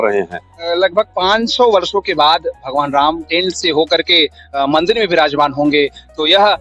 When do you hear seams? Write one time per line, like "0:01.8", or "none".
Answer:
none

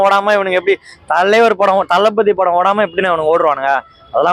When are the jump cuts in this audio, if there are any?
none

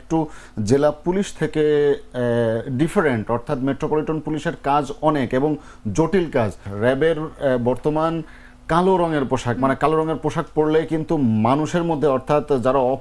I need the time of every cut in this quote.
0:06.6

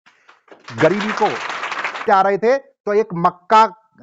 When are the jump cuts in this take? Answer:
0:02.1

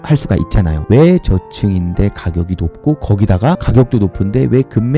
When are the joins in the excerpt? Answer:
none

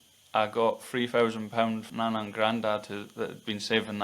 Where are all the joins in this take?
0:01.9

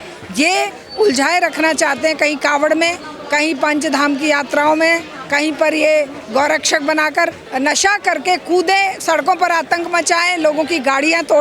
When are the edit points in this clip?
0:07.4

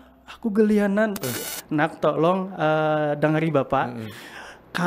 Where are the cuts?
0:01.4

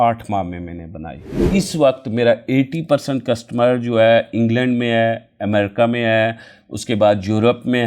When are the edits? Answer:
0:01.3

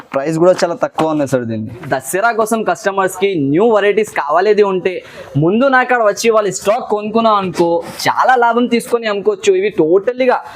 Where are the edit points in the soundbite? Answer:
0:01.9

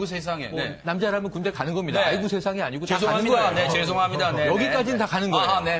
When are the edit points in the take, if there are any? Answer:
none

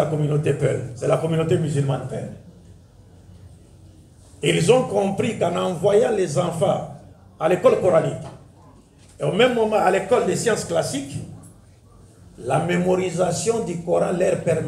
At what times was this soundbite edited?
0:00.9

